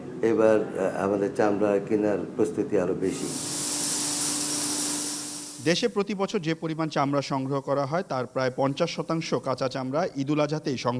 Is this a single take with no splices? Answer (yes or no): yes